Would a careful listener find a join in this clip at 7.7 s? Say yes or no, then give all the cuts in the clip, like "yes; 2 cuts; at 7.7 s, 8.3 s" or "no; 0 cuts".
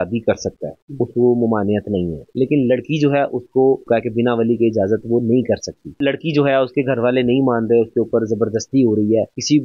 no; 3 cuts; at 2.2 s, 3.8 s, 5.9 s